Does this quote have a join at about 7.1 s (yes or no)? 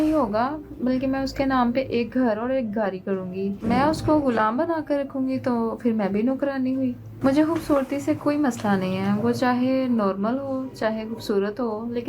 yes